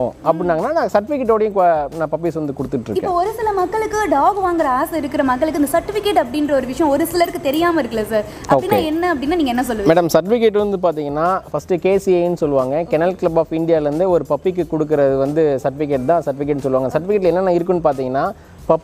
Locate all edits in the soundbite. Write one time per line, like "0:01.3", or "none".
none